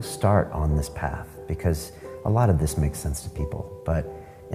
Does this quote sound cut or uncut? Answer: uncut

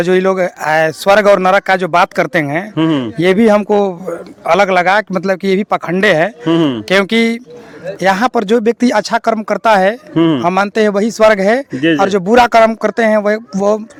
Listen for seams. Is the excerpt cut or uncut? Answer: uncut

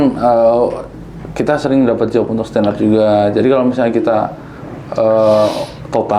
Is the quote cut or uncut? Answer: uncut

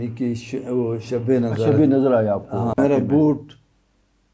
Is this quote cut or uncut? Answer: cut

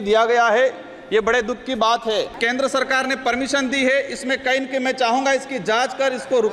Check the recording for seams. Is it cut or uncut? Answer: cut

